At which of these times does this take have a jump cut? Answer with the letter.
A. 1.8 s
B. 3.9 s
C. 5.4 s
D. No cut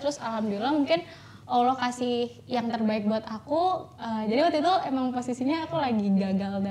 D